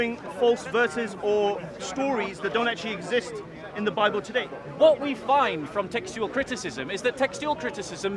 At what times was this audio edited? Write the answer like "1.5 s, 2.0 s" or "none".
4.5 s